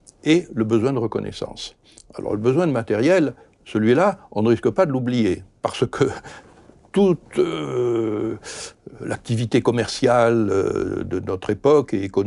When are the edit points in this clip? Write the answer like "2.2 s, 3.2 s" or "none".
none